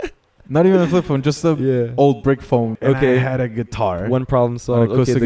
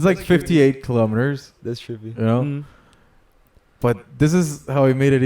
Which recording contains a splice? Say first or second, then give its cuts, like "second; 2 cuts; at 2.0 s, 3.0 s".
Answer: first; 1 cut; at 2.8 s